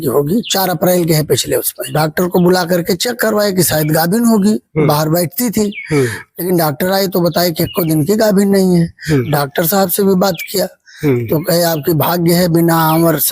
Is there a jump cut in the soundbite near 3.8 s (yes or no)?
no